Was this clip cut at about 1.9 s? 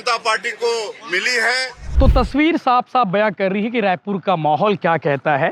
yes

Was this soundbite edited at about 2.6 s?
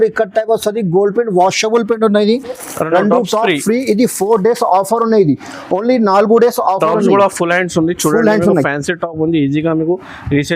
yes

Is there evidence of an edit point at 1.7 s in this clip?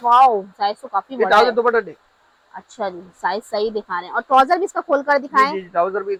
no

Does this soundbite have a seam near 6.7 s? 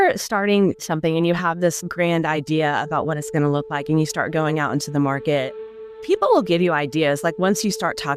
no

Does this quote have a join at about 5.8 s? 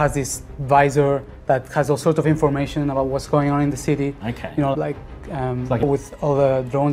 yes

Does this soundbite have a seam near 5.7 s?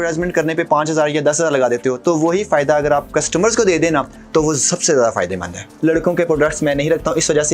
yes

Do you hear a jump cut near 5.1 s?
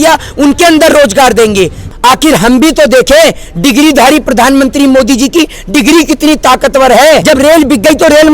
no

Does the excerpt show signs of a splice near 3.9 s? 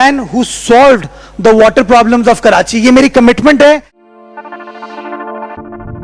yes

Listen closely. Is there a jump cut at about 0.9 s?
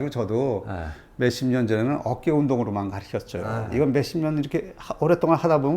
no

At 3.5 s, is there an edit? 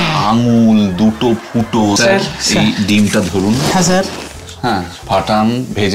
no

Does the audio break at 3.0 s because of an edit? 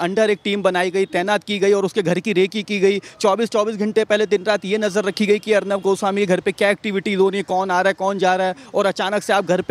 no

